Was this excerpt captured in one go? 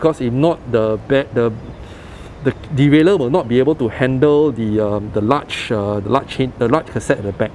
yes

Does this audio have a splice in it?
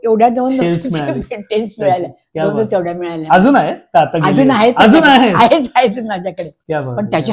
no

